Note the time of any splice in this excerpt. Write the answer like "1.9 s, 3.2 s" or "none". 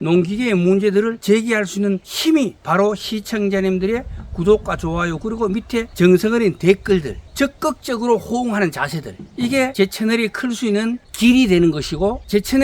5.9 s, 7.2 s, 9.6 s